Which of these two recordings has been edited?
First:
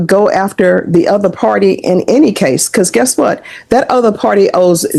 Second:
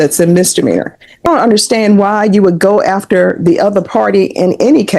second; 1 cut; at 1.2 s

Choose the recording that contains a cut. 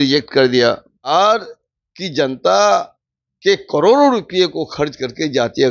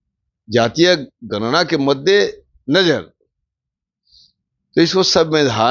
first; 1 cut; at 1.1 s

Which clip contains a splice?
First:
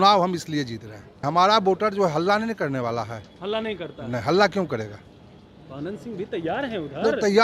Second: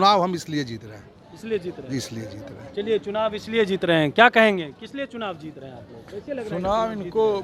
first; 1 cut; at 1.2 s

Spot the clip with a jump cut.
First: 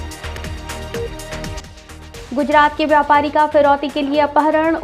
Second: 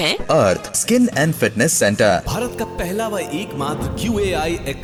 first; 1 cut; at 1.6 s

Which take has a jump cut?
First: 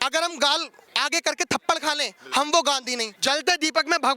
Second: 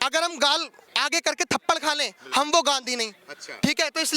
first; 1 cut; at 3.1 s

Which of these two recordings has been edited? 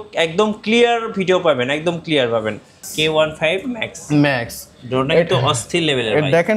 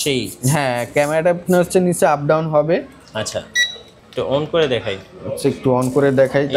first; 1 cut; at 2.8 s

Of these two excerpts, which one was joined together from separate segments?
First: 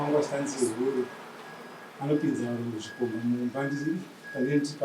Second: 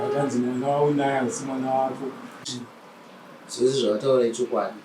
second; 1 cut; at 2.5 s

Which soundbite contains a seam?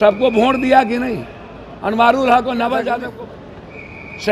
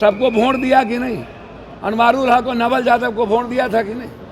first; 1 cut; at 3.0 s

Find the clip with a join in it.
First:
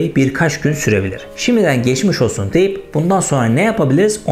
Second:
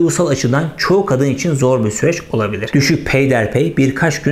second; 1 cut; at 2.6 s

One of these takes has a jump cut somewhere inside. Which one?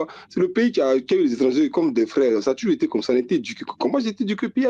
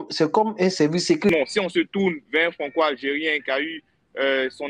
second; 1 cut; at 1.3 s

